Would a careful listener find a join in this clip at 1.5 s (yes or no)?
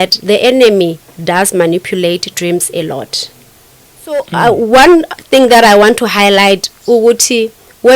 no